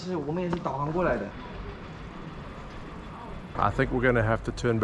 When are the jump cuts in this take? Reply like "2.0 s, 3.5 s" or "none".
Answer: 1.3 s, 3.4 s